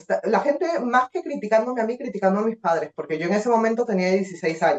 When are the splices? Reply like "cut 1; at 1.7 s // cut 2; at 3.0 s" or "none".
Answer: none